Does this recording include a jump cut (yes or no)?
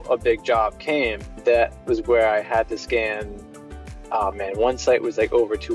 yes